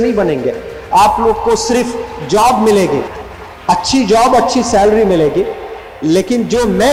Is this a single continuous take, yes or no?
yes